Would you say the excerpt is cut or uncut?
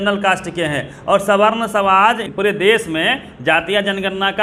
cut